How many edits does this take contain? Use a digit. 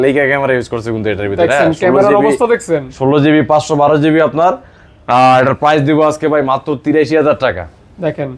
0